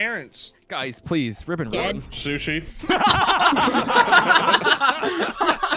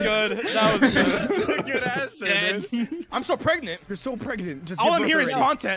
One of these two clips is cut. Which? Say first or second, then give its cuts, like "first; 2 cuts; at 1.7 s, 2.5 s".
second; 1 cut; at 3.0 s